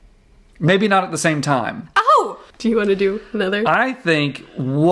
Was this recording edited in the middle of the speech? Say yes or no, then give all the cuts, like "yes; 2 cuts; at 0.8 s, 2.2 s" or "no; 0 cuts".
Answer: yes; 1 cut; at 2.4 s